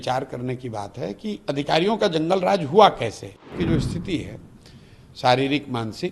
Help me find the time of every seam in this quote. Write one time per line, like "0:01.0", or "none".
0:03.5